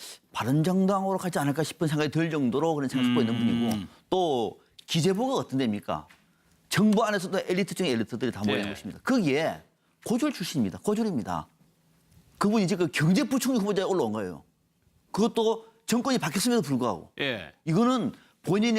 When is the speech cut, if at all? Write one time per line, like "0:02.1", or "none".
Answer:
0:12.0